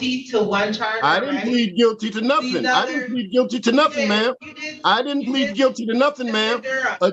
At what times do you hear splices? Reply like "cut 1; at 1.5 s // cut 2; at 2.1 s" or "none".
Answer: none